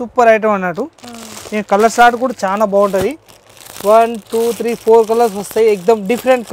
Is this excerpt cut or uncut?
uncut